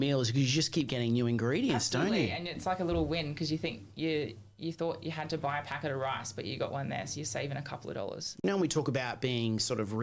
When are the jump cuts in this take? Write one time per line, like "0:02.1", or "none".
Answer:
0:08.4

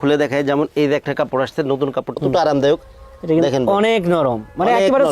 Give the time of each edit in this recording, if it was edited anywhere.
0:02.2

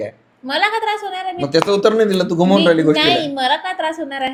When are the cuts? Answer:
none

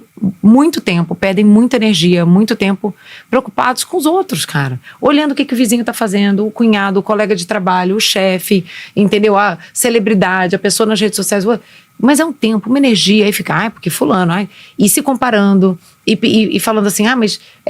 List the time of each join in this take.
none

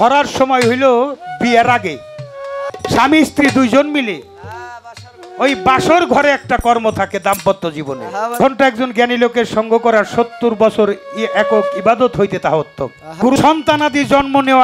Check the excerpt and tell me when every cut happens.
0:02.7
0:08.4
0:13.0

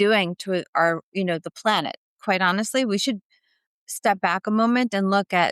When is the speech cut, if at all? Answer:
0:02.1

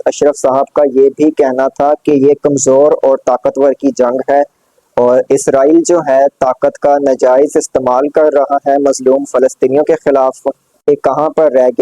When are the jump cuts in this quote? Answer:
0:10.9

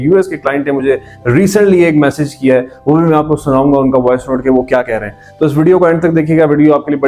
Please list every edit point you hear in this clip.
none

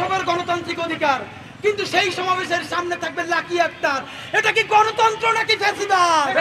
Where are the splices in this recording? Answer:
none

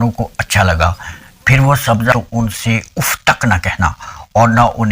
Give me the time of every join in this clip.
0:02.1

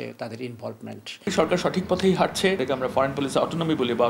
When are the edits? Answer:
0:01.3

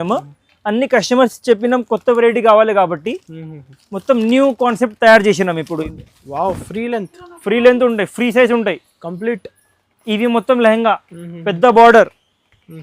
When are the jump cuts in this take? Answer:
0:05.9

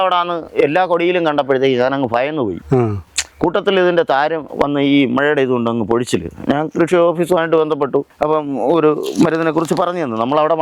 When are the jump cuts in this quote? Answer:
none

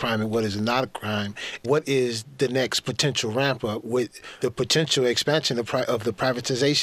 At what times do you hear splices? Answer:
0:01.5
0:04.2

